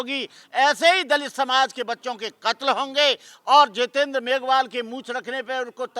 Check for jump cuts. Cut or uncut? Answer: uncut